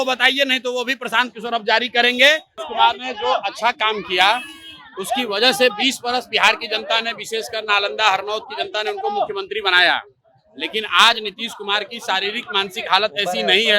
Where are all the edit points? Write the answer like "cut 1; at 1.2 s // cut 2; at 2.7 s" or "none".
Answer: cut 1; at 2.6 s